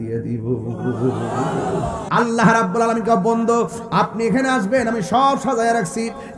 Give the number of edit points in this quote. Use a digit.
1